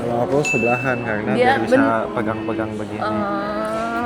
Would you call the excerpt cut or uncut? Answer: uncut